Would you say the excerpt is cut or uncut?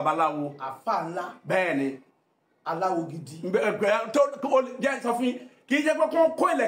uncut